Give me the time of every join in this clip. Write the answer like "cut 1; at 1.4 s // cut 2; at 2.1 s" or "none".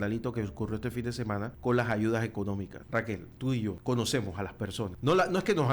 cut 1; at 1.5 s // cut 2; at 2.8 s // cut 3; at 3.8 s // cut 4; at 4.9 s